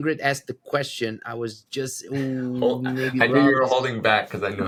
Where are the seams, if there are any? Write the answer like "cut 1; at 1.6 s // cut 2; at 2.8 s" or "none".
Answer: none